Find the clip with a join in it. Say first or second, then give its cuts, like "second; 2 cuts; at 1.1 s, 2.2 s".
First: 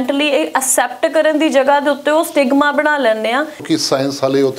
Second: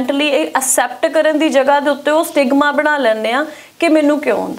first; 1 cut; at 3.6 s